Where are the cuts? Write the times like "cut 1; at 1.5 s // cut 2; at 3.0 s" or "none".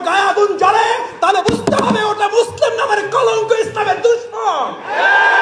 none